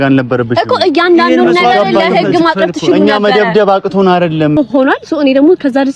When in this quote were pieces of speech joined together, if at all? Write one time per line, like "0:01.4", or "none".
0:04.6